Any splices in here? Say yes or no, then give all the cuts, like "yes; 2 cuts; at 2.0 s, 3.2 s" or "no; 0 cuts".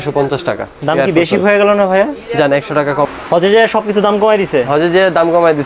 yes; 1 cut; at 3.1 s